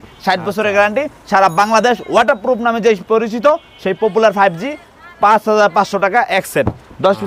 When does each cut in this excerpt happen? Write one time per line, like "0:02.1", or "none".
none